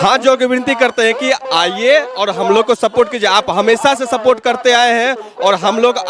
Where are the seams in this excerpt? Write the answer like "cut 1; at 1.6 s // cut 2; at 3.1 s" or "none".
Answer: none